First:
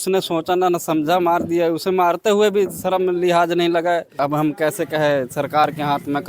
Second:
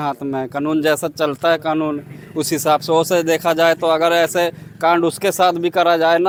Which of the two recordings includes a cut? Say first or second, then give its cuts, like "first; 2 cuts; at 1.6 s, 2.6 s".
first; 1 cut; at 4.1 s